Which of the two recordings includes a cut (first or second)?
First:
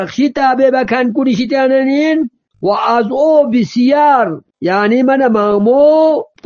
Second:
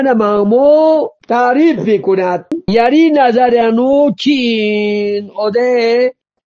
second